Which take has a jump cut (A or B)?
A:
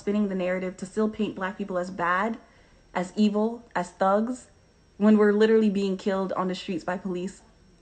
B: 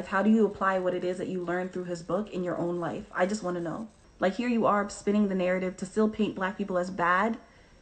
B